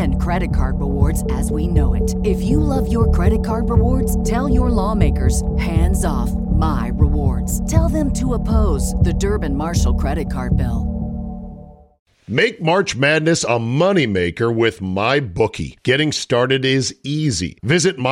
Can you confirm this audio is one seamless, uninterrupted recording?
no; 1 cut; at 12.1 s

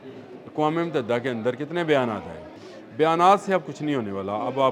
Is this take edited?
yes; 1 cut; at 2.5 s

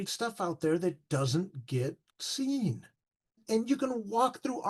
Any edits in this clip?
yes; 1 cut; at 3.2 s

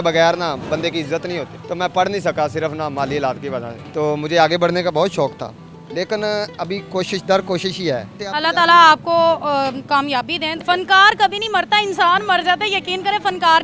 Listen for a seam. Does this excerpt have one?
no; 0 cuts

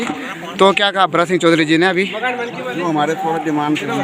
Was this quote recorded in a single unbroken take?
yes; 0 cuts

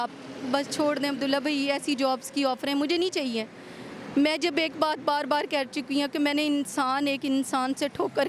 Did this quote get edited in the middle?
no; 0 cuts

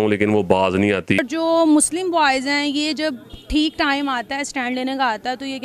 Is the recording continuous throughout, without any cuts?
yes; 0 cuts

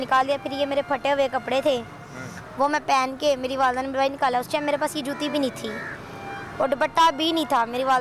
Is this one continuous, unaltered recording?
yes; 0 cuts

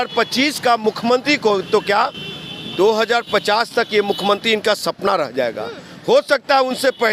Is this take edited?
no; 0 cuts

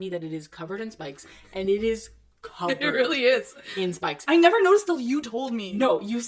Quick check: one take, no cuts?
yes; 0 cuts

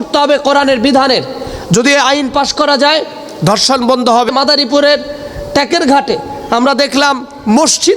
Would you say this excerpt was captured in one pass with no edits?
no; 1 cut; at 4.3 s

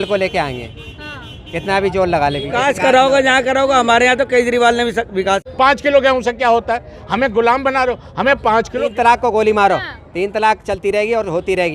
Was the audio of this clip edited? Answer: yes; 3 cuts; at 2.5 s, 5.5 s, 8.8 s

